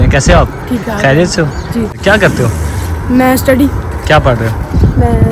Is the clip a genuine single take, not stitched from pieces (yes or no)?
no